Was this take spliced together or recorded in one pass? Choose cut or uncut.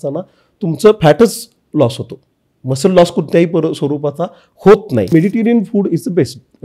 cut